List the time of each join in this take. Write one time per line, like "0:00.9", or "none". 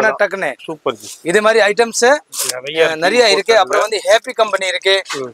none